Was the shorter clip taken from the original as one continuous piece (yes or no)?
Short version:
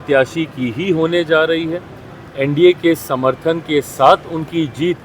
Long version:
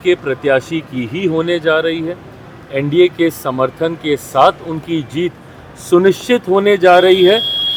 yes